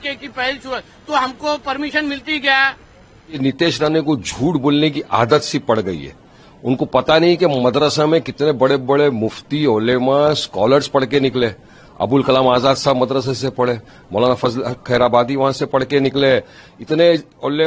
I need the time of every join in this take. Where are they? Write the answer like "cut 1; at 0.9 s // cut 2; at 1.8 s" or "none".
cut 1; at 3.4 s

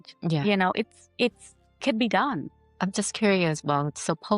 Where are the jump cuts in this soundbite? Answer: cut 1; at 2.5 s

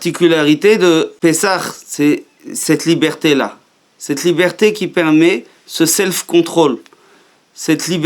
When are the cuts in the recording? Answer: cut 1; at 1.1 s

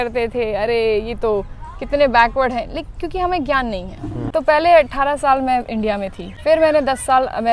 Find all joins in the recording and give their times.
cut 1; at 4.2 s // cut 2; at 6.3 s

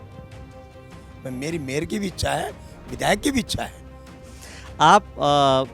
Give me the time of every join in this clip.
cut 1; at 4.3 s

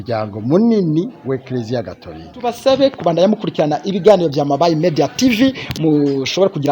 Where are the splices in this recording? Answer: cut 1; at 2.6 s

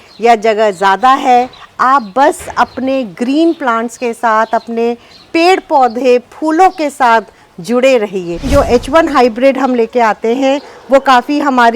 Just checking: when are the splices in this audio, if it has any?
cut 1; at 8.5 s

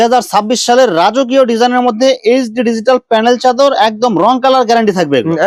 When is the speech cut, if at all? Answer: none

